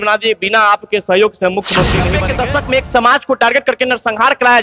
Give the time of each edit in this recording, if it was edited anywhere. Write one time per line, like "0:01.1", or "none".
0:02.2